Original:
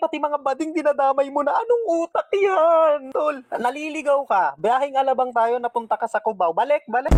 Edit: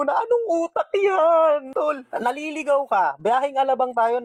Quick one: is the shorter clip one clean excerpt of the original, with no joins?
yes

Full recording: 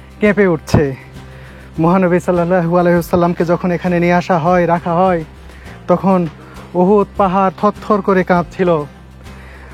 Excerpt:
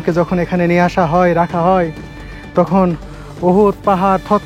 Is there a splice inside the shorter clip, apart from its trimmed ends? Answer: no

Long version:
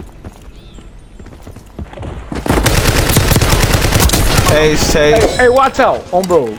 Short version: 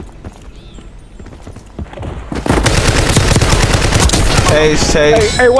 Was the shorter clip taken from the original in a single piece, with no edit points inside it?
yes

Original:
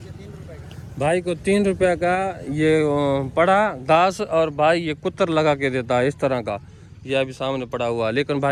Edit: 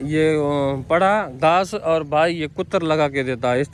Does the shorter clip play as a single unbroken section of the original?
yes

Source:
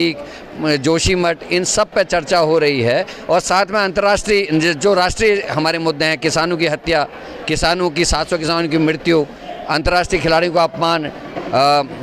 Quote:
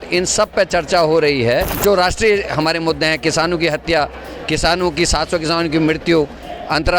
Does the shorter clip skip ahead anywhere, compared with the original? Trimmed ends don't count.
yes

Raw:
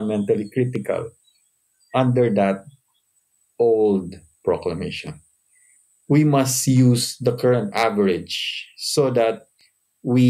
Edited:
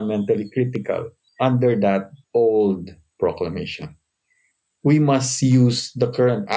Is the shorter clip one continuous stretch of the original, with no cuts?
no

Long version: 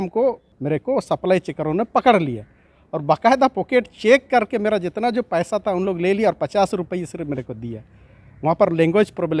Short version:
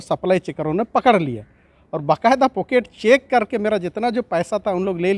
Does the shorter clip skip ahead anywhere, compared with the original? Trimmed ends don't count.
no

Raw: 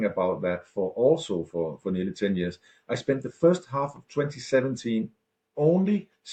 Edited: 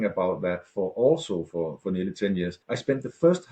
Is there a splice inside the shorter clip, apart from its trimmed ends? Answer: yes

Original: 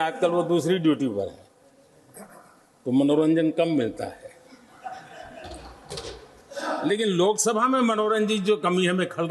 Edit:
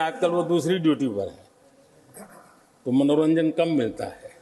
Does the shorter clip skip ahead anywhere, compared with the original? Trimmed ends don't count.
no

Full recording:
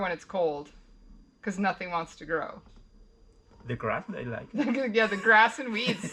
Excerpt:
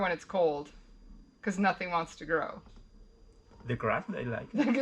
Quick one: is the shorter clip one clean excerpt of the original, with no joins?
yes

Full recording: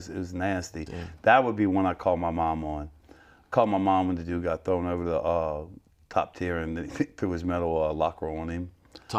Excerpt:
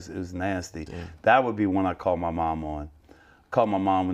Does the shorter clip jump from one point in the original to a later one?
no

